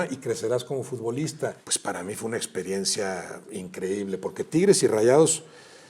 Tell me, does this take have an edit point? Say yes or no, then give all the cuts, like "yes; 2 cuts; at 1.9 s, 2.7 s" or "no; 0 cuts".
yes; 1 cut; at 1.7 s